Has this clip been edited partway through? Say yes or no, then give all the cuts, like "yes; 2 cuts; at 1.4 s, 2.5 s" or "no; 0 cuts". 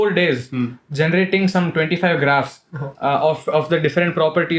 no; 0 cuts